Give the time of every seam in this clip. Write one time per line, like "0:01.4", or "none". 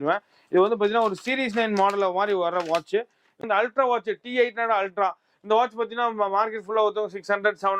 0:03.4